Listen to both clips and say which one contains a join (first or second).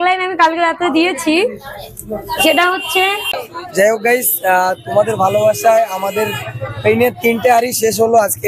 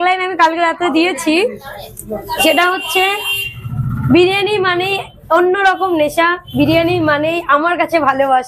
first